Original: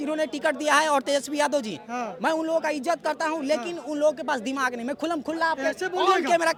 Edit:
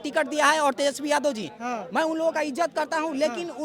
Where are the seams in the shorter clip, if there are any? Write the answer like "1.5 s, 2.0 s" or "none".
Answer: none